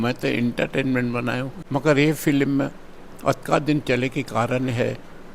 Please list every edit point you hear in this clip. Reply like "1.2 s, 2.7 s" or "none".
1.5 s